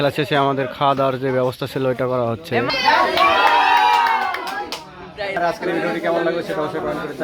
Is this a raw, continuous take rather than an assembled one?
no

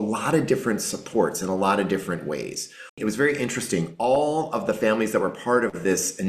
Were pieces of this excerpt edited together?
yes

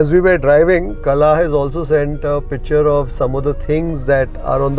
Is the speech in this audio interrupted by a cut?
no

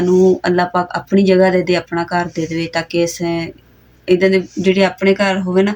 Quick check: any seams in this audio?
no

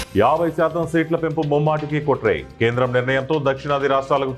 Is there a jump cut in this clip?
no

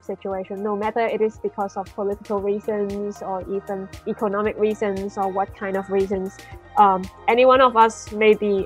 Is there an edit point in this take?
yes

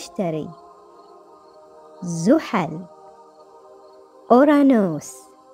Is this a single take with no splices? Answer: yes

